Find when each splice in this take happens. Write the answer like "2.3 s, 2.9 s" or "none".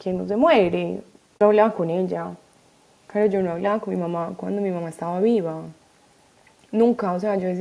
1.4 s